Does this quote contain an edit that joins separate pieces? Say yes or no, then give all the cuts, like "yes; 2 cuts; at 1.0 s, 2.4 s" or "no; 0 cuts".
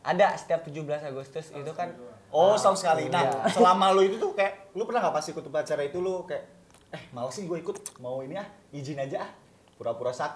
no; 0 cuts